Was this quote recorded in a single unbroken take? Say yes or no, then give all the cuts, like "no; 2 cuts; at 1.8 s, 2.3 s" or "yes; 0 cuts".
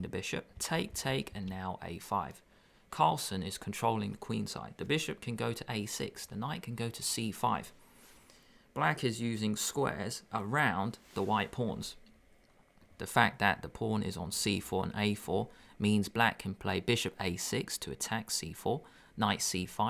yes; 0 cuts